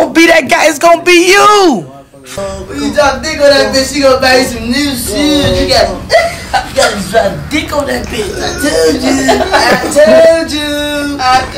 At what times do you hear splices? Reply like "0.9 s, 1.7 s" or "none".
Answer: 2.4 s